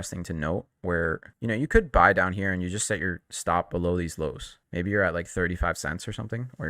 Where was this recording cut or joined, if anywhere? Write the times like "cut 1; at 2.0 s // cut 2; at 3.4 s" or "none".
none